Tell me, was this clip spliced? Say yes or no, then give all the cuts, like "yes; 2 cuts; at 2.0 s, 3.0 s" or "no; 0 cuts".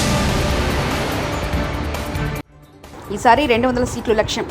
no; 0 cuts